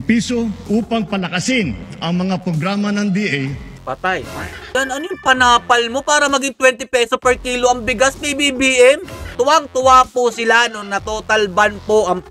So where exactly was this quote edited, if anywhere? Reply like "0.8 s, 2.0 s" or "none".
4.7 s, 9.2 s